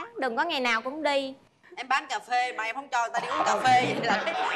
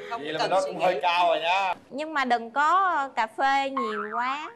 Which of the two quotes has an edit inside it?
second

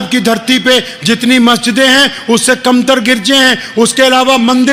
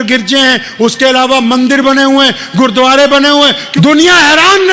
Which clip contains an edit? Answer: second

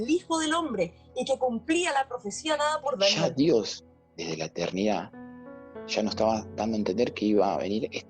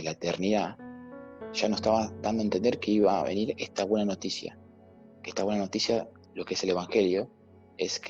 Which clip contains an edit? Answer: first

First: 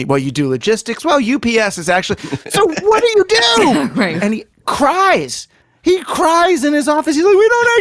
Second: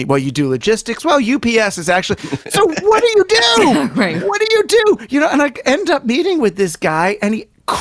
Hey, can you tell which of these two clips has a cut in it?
first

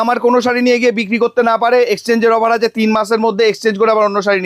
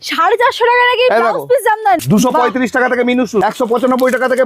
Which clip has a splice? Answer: second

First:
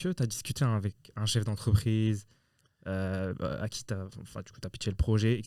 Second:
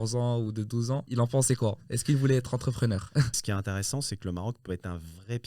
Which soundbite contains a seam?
second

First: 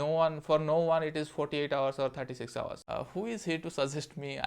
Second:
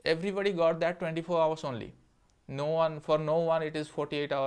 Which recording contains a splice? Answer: first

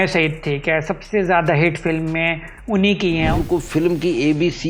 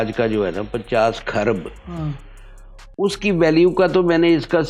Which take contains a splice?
first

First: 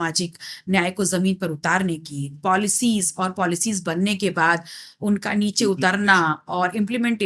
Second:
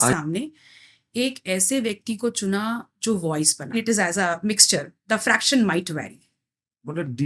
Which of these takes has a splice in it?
second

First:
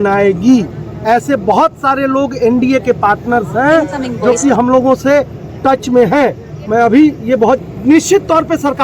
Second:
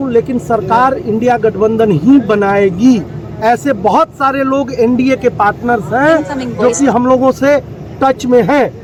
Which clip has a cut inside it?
first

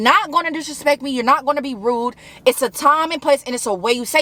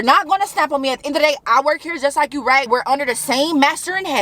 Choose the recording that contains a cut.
second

